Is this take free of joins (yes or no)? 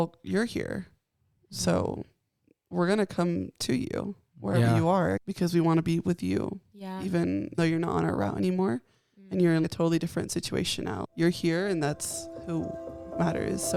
yes